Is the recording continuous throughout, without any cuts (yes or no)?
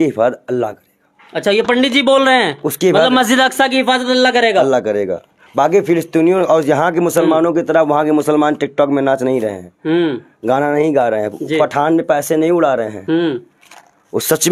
yes